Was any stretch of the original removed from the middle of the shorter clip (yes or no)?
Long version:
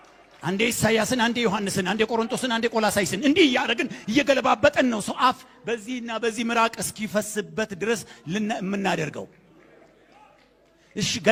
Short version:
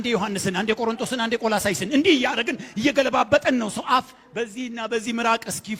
no